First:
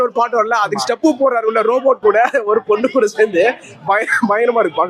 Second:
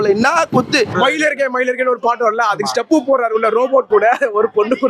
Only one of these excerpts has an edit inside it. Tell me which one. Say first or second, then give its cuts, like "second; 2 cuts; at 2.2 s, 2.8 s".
second; 1 cut; at 0.9 s